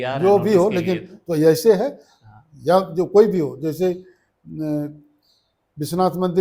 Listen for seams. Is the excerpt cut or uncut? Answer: uncut